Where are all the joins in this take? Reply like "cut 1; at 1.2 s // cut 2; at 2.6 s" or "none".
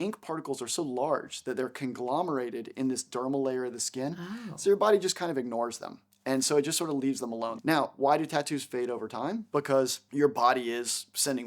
cut 1; at 7.5 s // cut 2; at 10.0 s